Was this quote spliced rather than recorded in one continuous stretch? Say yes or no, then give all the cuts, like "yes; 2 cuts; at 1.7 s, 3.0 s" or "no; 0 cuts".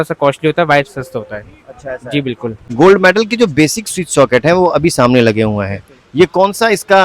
yes; 1 cut; at 2.7 s